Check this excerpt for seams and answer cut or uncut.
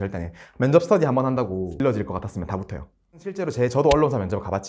cut